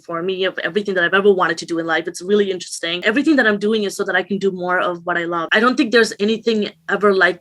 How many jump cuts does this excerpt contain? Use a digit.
2